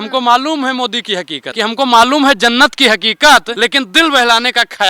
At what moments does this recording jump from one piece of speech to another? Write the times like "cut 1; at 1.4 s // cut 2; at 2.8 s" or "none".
cut 1; at 1.4 s // cut 2; at 3.5 s